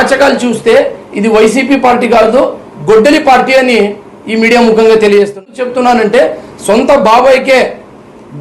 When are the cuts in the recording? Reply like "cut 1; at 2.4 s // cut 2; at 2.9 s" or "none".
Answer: cut 1; at 5.6 s